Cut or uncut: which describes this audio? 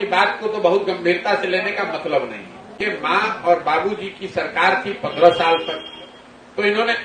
cut